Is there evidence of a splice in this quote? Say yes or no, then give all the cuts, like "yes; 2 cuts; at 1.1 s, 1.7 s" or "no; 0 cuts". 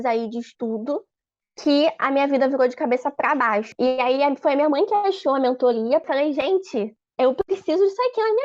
yes; 2 cuts; at 3.7 s, 6.0 s